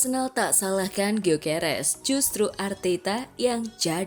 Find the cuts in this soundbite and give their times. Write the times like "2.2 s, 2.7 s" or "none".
none